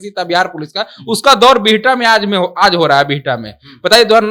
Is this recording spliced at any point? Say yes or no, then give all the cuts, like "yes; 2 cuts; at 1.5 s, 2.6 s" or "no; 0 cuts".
no; 0 cuts